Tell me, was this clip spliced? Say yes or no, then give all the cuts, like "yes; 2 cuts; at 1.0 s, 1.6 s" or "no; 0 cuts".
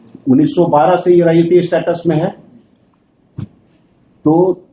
no; 0 cuts